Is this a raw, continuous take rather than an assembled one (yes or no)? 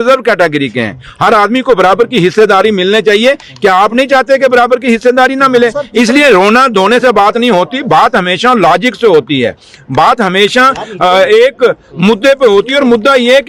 yes